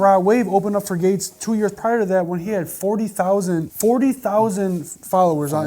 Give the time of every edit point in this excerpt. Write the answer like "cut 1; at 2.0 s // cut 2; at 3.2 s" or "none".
cut 1; at 3.7 s